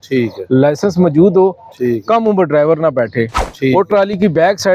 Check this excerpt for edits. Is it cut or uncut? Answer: uncut